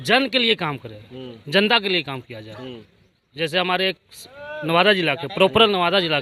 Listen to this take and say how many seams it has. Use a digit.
0